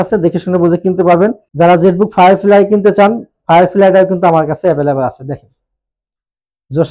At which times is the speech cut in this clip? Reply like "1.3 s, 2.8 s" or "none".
1.4 s